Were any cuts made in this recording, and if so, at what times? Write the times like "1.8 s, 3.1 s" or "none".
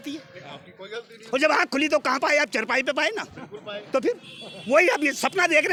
none